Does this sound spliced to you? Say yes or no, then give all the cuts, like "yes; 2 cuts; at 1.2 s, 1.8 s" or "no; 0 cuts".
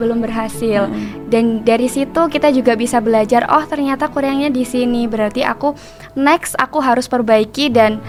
no; 0 cuts